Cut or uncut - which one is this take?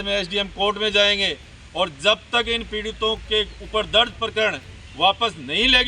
uncut